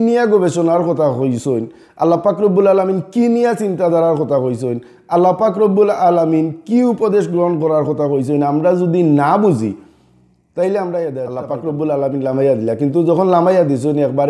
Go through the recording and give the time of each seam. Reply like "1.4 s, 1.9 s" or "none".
11.4 s